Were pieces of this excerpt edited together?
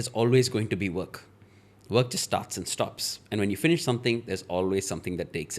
no; 0 cuts

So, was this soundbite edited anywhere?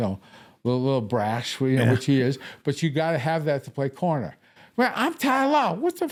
no; 0 cuts

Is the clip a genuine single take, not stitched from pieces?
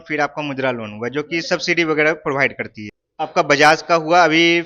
no; 1 cut; at 3.1 s

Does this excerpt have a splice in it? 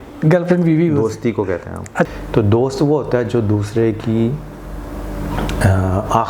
yes; 1 cut; at 2.1 s

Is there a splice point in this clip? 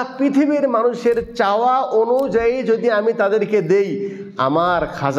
no; 0 cuts

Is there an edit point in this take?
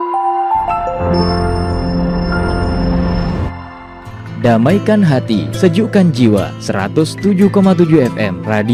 no; 0 cuts

